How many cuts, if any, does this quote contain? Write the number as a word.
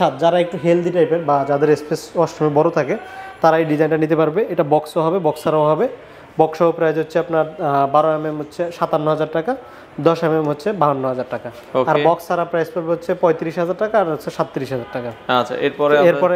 zero